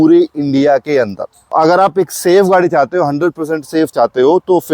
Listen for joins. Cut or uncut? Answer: cut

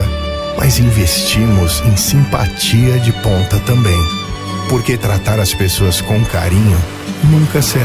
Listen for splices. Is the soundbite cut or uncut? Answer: uncut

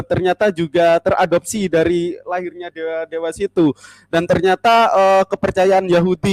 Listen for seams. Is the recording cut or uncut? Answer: uncut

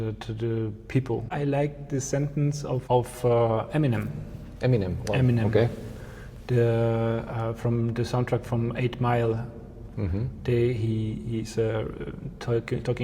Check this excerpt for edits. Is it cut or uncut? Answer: cut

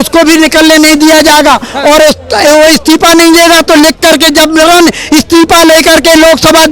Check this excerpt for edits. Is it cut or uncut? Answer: uncut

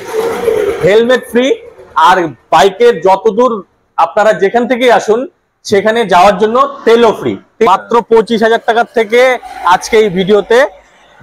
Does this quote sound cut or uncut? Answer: cut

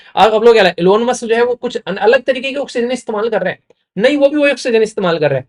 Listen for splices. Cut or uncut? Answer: uncut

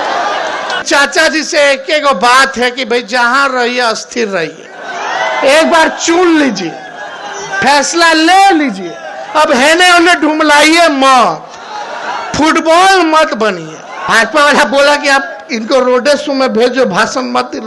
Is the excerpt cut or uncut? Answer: cut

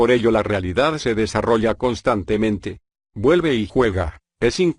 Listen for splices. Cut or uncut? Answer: uncut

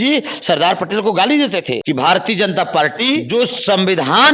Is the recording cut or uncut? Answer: cut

